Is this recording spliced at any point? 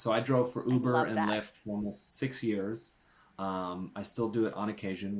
no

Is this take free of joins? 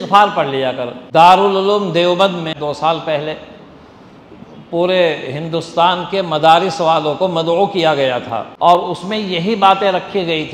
no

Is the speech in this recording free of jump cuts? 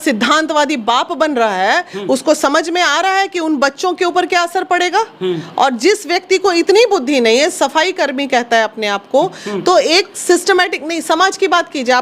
yes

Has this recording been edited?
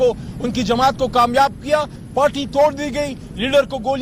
yes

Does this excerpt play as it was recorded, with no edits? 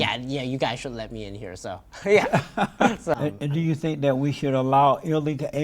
no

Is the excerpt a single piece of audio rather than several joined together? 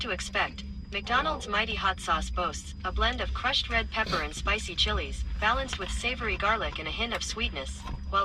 yes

